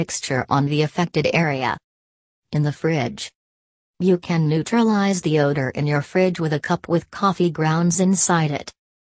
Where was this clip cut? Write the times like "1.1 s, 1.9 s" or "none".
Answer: 6.4 s